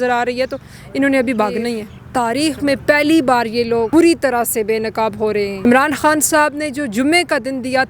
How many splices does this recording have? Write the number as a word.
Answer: three